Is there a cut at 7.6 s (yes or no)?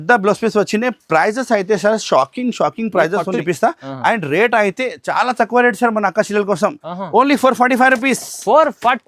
no